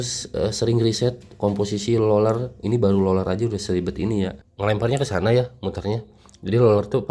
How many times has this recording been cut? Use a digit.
1